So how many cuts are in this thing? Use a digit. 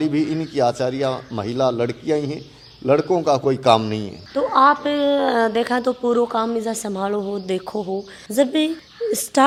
0